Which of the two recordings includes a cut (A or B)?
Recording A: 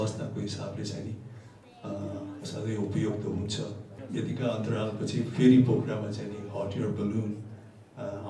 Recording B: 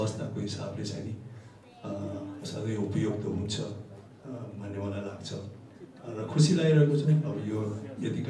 A